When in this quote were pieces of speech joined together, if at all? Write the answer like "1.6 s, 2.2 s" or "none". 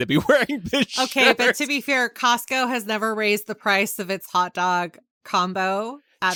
none